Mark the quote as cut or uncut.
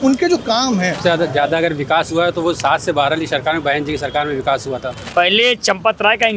cut